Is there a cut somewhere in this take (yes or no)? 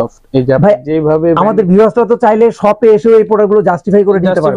no